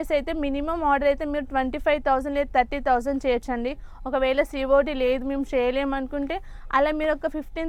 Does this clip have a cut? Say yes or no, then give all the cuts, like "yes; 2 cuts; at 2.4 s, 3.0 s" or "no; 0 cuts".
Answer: no; 0 cuts